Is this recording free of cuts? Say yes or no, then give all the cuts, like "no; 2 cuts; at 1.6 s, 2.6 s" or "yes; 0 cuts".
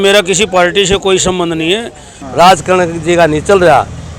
no; 1 cut; at 2.2 s